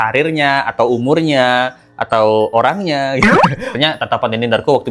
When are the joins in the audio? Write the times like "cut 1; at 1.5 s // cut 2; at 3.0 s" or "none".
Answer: cut 1; at 3.7 s